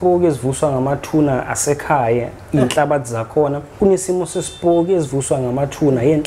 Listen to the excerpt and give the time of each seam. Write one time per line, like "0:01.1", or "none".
0:03.6

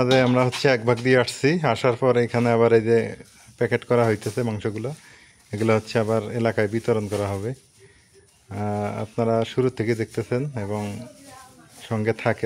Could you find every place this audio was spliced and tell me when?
none

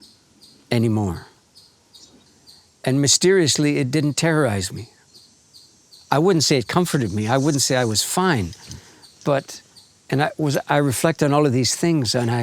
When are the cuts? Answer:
0:02.4

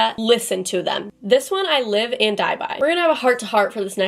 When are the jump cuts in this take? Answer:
0:01.1
0:02.7

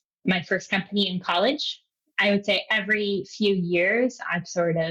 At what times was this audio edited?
0:02.0

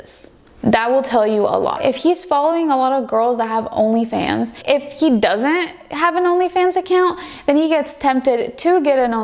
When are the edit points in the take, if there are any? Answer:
0:01.8
0:04.6

